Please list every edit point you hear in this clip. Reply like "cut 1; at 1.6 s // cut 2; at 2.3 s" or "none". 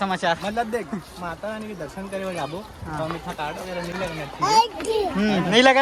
none